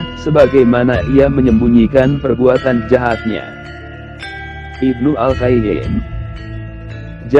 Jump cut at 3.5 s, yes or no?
no